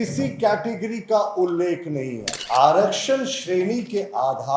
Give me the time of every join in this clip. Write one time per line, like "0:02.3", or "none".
0:02.4